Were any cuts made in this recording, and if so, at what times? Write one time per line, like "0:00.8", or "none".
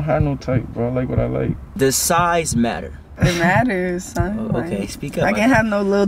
0:01.7
0:02.9